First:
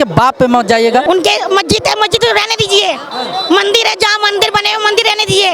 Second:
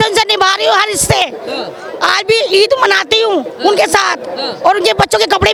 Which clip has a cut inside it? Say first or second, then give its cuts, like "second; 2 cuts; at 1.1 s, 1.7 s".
first; 1 cut; at 1.0 s